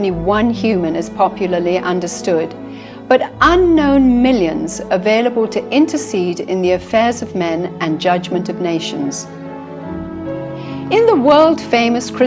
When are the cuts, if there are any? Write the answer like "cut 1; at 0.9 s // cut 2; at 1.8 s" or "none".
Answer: cut 1; at 2.1 s